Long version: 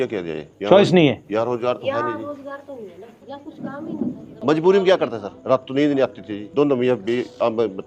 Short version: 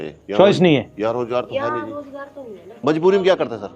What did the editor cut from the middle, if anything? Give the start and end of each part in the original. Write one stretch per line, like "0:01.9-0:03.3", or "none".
0:03.0-0:04.3